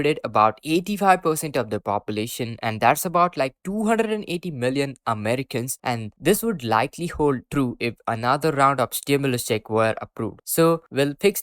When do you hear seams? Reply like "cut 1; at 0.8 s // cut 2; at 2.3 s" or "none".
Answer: none